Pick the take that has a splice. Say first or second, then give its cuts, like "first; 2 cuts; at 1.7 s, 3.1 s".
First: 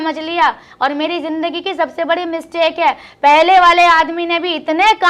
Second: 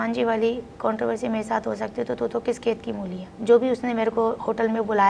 second; 1 cut; at 3.4 s